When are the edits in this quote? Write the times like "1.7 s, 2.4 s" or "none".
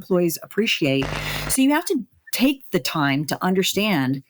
none